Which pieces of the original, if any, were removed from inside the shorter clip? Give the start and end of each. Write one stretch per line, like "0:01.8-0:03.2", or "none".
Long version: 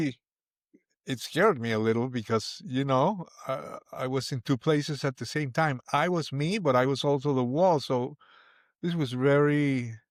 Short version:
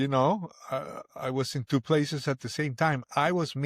none